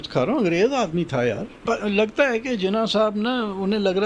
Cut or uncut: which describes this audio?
cut